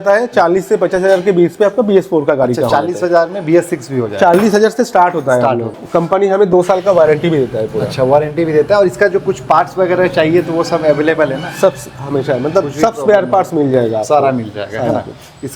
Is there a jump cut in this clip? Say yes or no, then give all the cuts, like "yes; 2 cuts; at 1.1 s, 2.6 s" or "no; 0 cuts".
no; 0 cuts